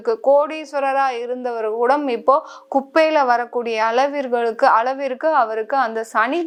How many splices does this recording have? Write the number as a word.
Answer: zero